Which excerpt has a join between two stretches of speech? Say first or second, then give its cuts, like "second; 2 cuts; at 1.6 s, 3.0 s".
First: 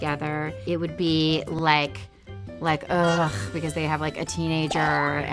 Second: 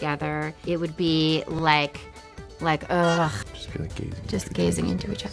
second; 1 cut; at 3.4 s